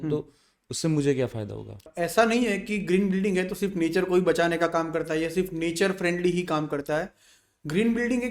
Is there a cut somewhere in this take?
yes; 1 cut; at 1.9 s

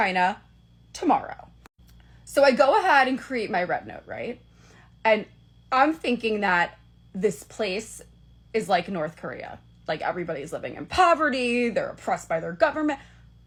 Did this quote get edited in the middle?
no; 0 cuts

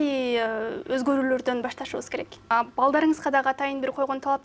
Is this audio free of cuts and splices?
no; 1 cut; at 2.4 s

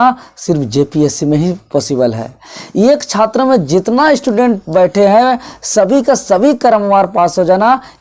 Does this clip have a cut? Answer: no; 0 cuts

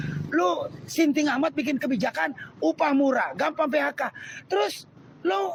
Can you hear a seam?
no; 0 cuts

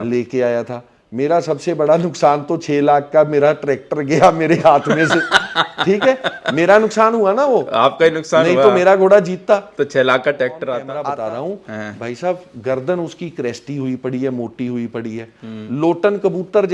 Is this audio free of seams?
no; 1 cut; at 10.9 s

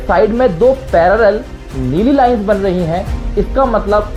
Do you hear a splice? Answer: no; 0 cuts

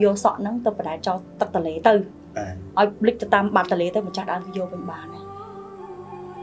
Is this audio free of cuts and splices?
yes; 0 cuts

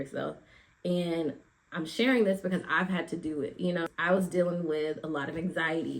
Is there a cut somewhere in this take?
yes; 1 cut; at 3.9 s

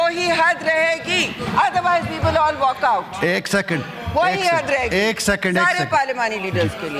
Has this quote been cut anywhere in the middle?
no; 0 cuts

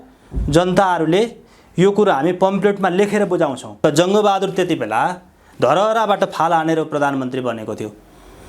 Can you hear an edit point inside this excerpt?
yes; 1 cut; at 3.6 s

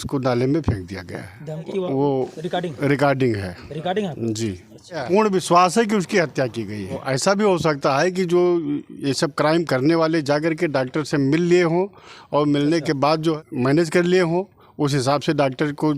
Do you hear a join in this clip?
yes; 4 cuts; at 1.7 s, 5.0 s, 7.0 s, 13.4 s

